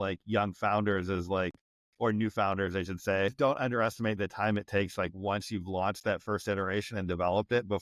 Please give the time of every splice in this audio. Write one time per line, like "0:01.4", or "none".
0:03.3